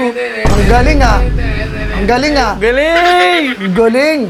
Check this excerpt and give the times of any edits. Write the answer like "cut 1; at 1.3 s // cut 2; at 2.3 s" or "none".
none